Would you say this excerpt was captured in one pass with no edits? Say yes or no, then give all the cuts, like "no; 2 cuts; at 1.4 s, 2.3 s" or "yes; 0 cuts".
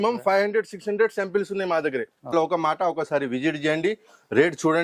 no; 1 cut; at 2.3 s